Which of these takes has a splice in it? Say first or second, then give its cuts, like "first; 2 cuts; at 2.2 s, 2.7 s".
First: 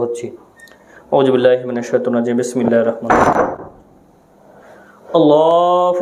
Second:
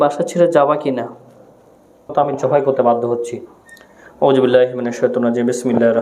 second; 1 cut; at 2.1 s